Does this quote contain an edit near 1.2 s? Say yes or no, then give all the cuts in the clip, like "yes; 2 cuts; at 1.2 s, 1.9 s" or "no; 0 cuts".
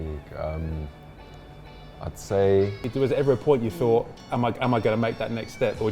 no; 2 cuts; at 2.9 s, 4.2 s